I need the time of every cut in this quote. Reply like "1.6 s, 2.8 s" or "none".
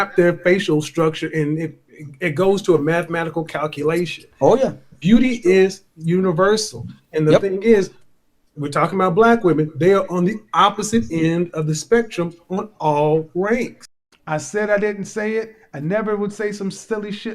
13.8 s